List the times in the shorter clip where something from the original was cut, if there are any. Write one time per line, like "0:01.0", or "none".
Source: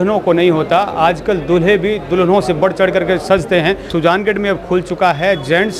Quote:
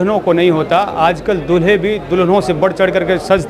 none

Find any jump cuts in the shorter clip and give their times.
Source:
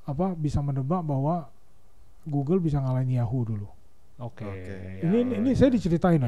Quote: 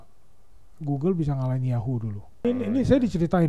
0:02.4

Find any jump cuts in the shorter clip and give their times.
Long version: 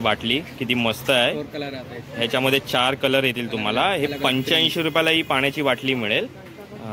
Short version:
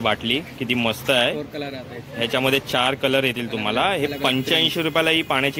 none

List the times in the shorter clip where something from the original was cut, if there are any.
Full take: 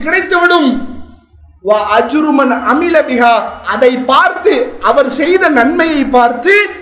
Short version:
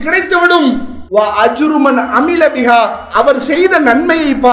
0:00.9
0:03.0

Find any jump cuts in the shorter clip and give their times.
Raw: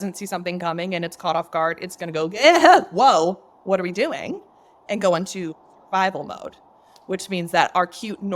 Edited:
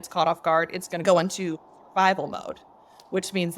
0:01.0

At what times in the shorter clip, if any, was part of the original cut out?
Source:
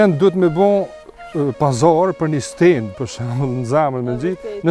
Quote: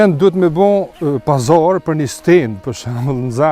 0:00.9

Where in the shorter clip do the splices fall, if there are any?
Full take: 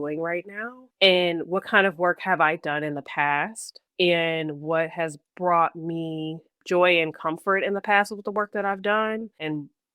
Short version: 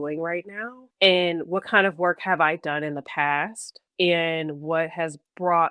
none

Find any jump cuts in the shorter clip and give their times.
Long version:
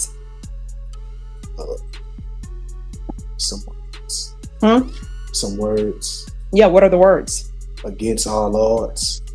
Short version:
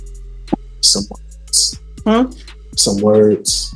none

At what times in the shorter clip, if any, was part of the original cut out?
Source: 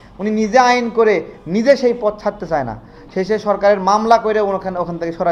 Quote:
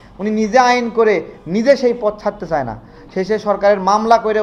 none

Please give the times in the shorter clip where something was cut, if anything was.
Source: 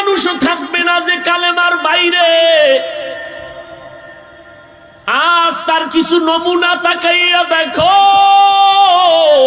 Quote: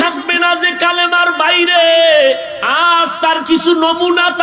0:02.6

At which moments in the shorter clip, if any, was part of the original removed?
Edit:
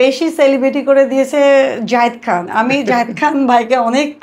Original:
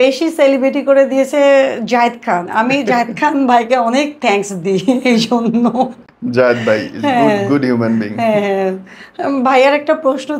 none

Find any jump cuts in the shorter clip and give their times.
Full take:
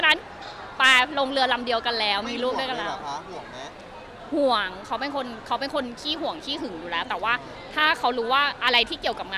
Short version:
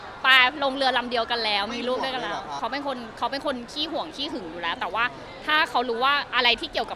0:02.6

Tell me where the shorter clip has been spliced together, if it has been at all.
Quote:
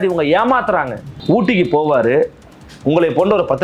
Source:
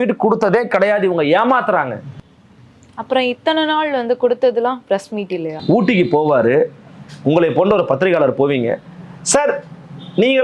0:01.1

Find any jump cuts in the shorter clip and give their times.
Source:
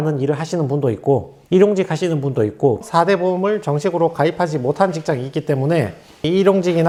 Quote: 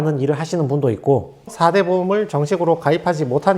0:01.4

